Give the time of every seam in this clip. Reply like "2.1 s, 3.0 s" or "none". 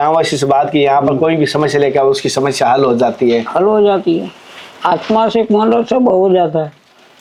none